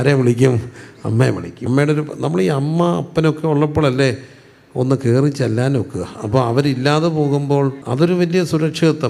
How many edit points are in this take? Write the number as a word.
two